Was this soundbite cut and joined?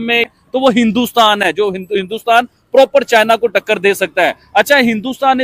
no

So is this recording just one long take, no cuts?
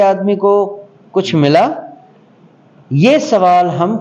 yes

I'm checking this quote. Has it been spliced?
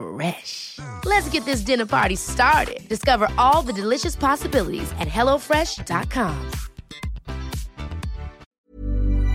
yes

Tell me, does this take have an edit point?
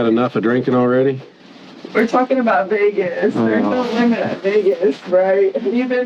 no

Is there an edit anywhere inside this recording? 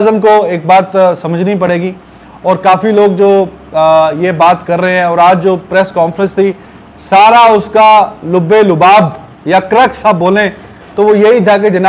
no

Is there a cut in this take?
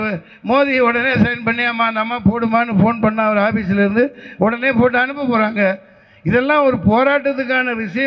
no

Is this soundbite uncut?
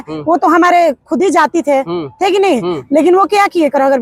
yes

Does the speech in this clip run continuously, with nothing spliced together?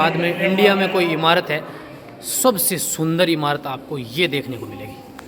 yes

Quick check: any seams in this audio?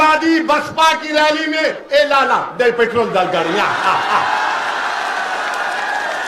no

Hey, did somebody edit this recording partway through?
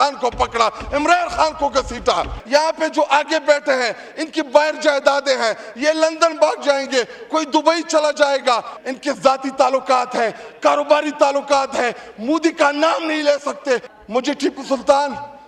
yes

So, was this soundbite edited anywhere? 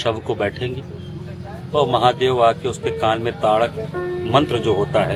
no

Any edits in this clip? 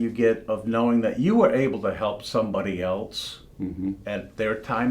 no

